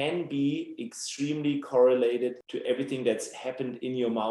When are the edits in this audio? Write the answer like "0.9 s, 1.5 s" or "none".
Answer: 2.5 s